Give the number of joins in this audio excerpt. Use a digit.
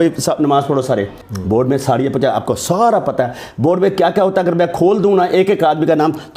1